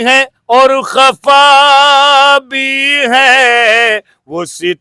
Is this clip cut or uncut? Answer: uncut